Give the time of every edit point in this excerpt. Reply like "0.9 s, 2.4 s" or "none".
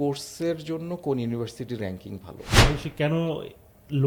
2.5 s